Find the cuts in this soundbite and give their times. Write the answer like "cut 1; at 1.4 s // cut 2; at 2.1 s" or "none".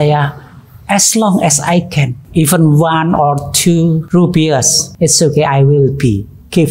cut 1; at 2.2 s // cut 2; at 4.0 s // cut 3; at 4.8 s